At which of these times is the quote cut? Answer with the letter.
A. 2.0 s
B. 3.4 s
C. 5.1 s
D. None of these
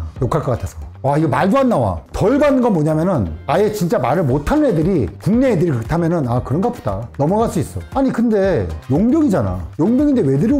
A